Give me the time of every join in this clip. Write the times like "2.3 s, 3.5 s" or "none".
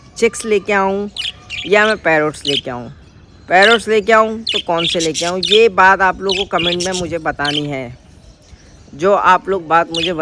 none